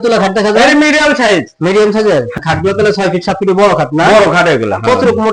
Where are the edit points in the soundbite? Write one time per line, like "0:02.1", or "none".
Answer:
0:02.4